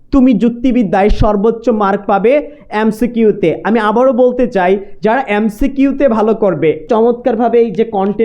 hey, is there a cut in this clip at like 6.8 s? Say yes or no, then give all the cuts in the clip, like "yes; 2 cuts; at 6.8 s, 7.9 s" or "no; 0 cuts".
yes; 1 cut; at 6.8 s